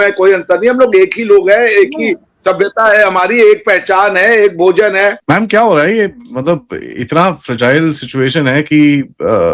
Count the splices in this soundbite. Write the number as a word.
one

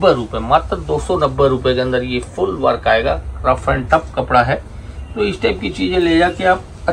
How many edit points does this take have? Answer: zero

